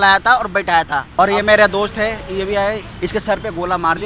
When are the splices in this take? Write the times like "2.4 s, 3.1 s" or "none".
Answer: 1.1 s